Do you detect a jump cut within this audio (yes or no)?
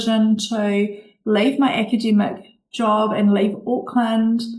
no